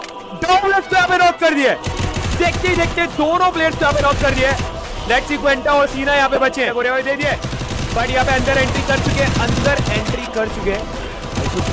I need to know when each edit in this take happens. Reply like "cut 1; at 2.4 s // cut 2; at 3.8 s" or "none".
cut 1; at 6.7 s